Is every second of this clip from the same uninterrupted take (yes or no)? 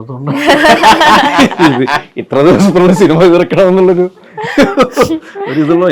yes